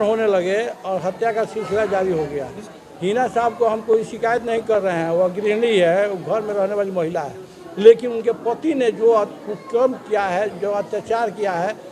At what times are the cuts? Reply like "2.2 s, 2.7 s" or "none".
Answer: 2.6 s